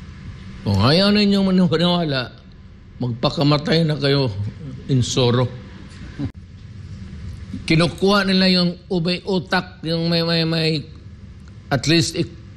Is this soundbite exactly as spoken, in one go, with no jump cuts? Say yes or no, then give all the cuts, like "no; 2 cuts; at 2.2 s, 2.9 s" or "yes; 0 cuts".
no; 1 cut; at 6.3 s